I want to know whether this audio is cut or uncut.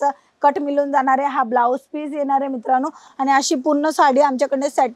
uncut